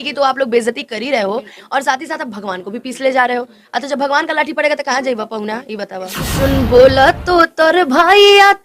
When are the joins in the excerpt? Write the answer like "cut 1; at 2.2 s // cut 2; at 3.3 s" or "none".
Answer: cut 1; at 6.3 s